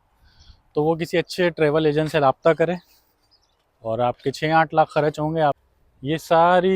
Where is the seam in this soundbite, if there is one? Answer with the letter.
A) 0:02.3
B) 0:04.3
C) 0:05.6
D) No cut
C